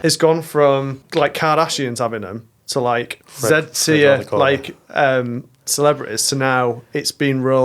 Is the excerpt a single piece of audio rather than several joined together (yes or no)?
no